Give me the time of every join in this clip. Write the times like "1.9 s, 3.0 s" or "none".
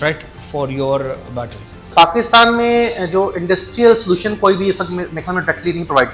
1.9 s